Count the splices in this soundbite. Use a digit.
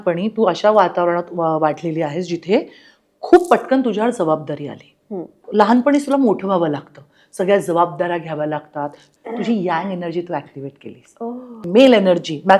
3